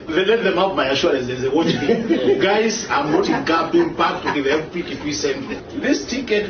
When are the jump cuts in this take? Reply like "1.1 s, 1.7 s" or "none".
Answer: 5.6 s